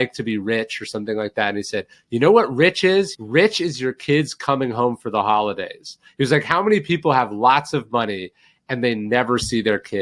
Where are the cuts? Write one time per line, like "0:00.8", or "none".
0:03.2